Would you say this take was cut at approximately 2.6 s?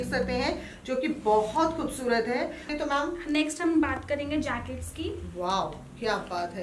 yes; 1 cut; at 2.6 s

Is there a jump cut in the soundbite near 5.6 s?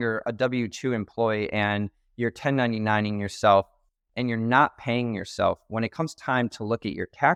no; 0 cuts

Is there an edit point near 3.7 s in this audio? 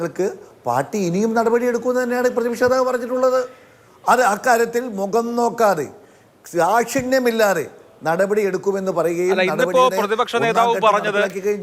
no; 0 cuts

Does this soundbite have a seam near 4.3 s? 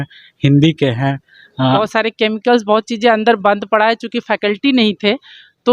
no; 1 cut; at 1.8 s

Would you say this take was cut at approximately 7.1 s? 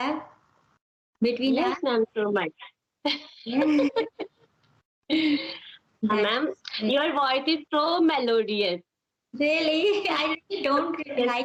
no; 0 cuts

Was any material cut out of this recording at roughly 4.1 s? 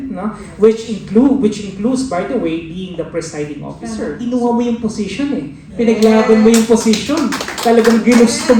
yes; 1 cut; at 4.1 s

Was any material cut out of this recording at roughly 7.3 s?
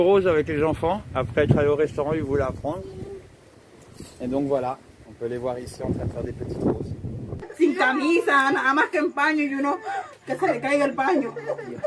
yes; 1 cut; at 7.3 s

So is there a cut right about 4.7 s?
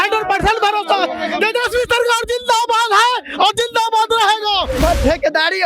yes; 1 cut; at 4.7 s

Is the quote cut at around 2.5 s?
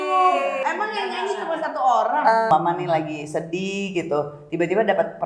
yes; 1 cut; at 2.5 s

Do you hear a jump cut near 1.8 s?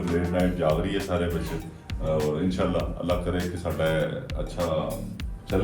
no; 0 cuts

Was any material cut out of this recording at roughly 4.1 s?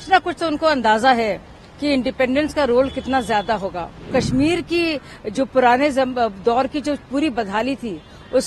yes; 1 cut; at 4.1 s

